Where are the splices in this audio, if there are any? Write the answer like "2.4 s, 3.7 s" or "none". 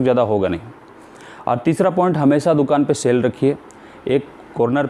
none